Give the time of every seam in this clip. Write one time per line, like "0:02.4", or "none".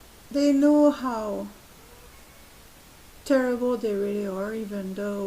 0:03.8